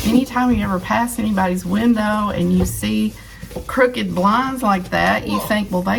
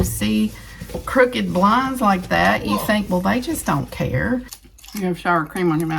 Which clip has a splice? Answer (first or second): second